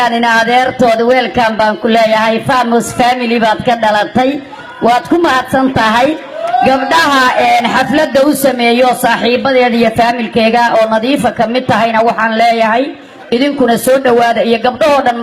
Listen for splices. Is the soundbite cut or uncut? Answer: cut